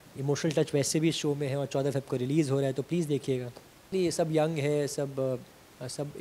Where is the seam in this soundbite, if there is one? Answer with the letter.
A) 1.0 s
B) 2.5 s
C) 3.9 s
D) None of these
C